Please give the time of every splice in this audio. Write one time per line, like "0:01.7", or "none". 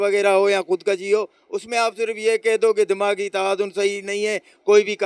none